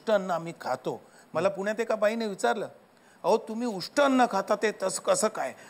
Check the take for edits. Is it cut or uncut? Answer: uncut